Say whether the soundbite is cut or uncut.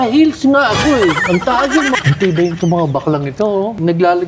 uncut